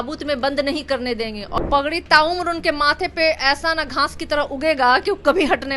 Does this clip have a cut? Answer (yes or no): yes